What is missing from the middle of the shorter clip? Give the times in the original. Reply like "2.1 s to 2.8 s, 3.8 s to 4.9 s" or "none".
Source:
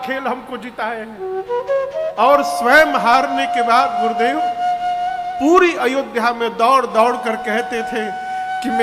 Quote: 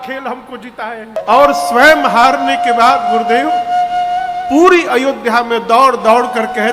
1.2 s to 2.1 s